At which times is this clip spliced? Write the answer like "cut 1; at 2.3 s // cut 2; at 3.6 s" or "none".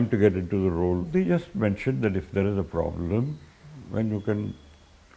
cut 1; at 1.1 s